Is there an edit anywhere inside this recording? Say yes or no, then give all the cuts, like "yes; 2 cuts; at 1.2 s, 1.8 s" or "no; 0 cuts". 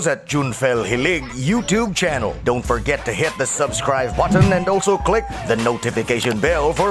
no; 0 cuts